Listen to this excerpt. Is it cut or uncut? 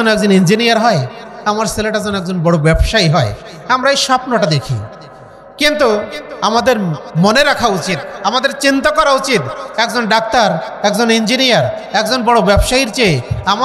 uncut